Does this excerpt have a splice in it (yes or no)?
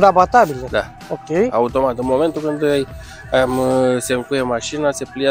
no